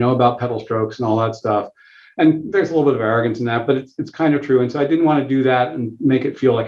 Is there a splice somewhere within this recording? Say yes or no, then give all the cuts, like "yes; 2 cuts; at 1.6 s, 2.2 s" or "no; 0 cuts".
no; 0 cuts